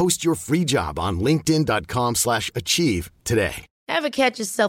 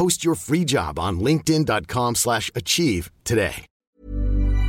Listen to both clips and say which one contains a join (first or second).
second